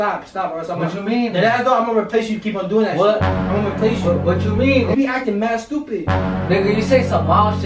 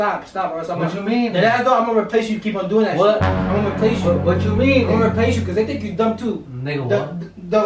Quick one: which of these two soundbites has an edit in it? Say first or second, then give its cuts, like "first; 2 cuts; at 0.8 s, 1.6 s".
first; 1 cut; at 4.9 s